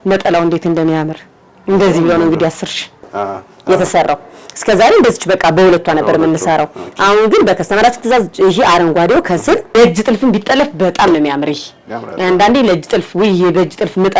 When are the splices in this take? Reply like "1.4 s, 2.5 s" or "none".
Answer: 3.2 s, 9.7 s